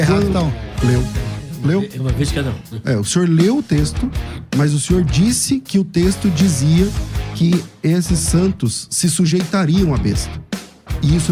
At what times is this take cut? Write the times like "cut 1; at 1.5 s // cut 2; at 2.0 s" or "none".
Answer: none